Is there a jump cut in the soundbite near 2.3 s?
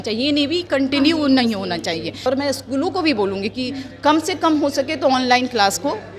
yes; 1 cut; at 2.3 s

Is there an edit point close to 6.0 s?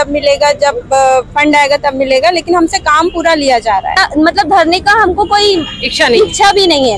no; 1 cut; at 4.0 s

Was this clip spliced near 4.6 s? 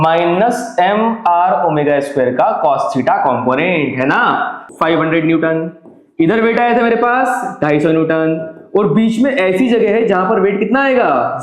yes; 1 cut; at 4.6 s

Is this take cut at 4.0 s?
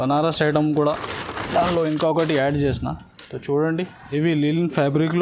yes; 1 cut; at 4.0 s

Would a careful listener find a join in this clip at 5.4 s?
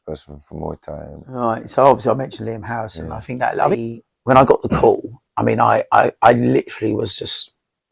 no; 2 cuts; at 1.4 s, 3.8 s

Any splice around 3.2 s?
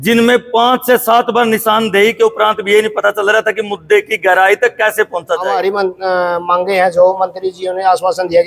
no; 1 cut; at 5.5 s

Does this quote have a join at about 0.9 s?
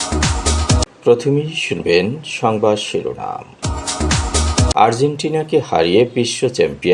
yes; 1 cut; at 0.9 s

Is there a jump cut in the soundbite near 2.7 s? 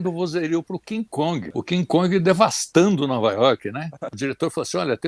no; 2 cuts; at 1.5 s, 4.1 s

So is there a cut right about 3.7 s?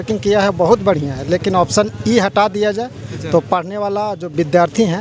no; 0 cuts

